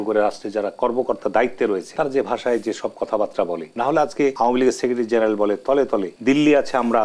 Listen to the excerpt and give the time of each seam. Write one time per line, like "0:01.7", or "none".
0:01.9
0:03.7
0:04.3
0:06.1